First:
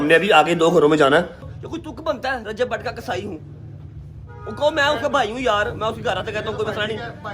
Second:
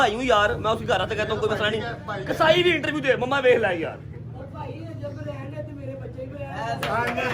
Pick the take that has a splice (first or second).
first